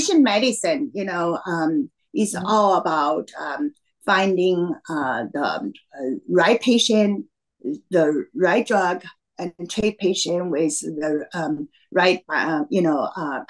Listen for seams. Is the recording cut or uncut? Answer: uncut